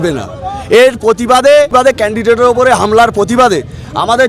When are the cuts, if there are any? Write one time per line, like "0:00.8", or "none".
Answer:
0:01.8